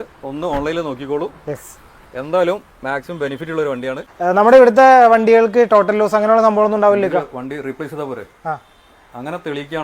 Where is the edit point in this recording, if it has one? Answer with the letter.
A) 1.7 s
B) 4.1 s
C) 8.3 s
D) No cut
B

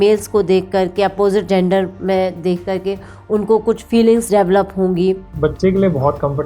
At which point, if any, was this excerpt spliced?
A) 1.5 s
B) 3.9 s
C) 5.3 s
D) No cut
C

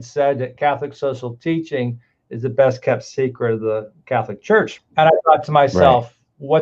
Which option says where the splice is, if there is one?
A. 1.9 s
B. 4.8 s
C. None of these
B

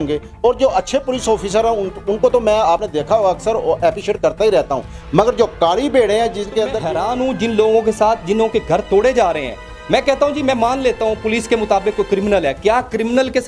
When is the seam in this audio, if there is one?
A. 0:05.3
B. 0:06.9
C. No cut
B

